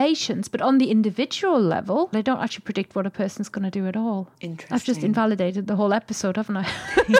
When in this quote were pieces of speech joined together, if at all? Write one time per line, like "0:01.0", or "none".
0:02.1
0:04.4

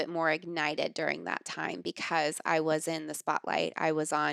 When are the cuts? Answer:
none

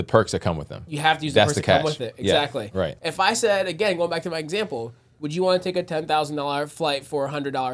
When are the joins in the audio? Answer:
0:02.9

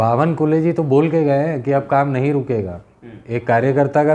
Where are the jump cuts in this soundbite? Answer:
none

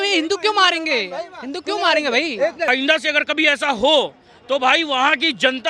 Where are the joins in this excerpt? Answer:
0:02.7

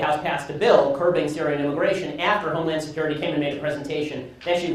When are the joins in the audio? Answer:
none

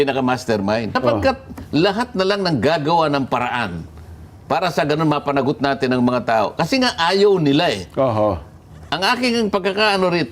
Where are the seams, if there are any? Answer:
0:01.0

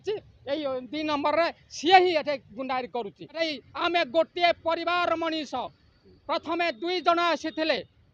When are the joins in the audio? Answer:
0:03.6

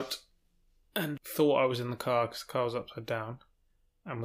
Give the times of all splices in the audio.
0:01.2

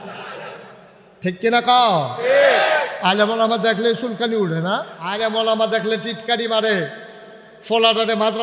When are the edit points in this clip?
0:05.0

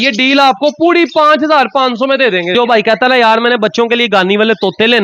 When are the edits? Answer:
0:02.5

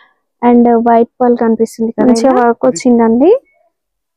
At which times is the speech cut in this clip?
0:01.9

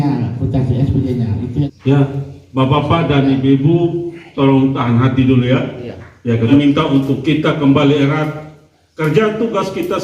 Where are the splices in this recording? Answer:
0:01.7
0:06.5

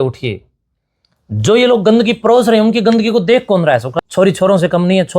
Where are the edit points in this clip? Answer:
0:03.9

